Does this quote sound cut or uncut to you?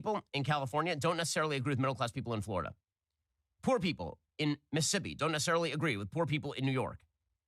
uncut